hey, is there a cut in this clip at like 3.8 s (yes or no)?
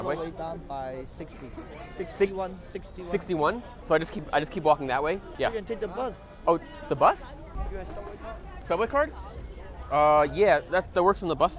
yes